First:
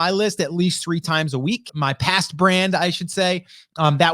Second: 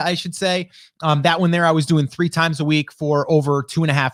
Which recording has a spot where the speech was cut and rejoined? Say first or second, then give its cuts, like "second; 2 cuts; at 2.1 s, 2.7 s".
first; 1 cut; at 1.7 s